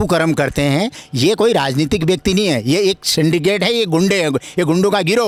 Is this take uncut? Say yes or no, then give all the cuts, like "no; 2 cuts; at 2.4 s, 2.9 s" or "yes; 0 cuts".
yes; 0 cuts